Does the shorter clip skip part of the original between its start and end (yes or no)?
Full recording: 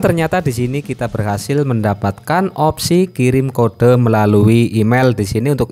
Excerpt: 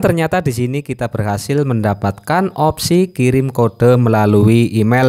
no